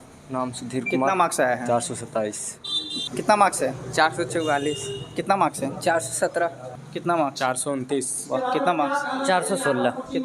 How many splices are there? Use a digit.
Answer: 2